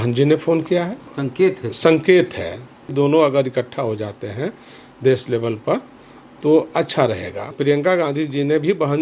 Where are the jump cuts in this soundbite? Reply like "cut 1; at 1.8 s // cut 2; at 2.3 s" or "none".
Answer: cut 1; at 1.1 s // cut 2; at 2.9 s // cut 3; at 7.5 s